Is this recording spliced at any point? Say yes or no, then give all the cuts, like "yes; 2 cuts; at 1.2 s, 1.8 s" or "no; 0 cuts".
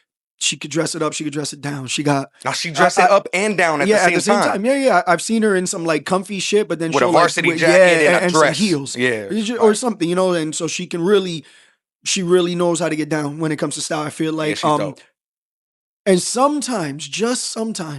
no; 0 cuts